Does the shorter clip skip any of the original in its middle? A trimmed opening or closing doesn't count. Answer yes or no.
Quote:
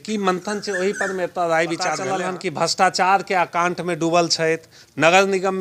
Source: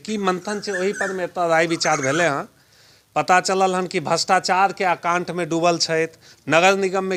yes